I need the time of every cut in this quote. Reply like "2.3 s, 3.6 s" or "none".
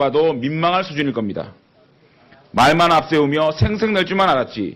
1.6 s

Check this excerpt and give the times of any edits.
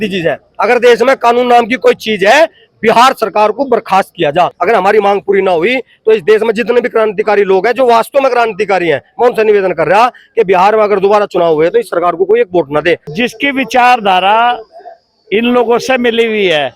4.6 s, 13.1 s

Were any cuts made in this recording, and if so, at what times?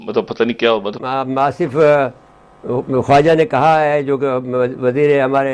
1.0 s

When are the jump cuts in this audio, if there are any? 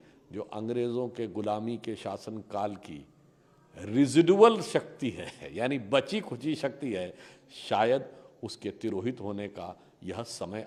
none

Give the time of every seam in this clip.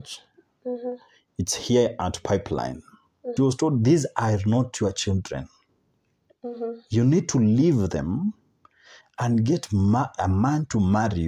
3.3 s

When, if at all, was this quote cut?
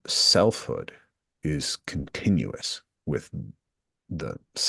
none

